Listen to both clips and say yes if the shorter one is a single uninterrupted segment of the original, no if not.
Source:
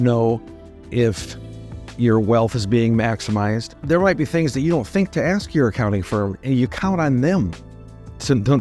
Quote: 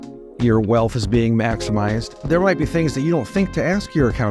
yes